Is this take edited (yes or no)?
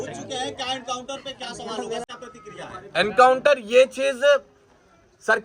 yes